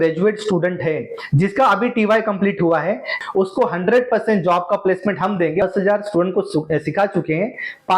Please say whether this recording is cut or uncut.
cut